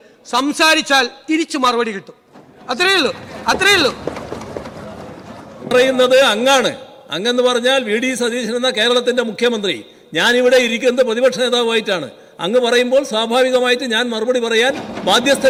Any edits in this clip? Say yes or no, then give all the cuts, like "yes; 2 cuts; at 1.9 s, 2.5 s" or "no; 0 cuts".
no; 0 cuts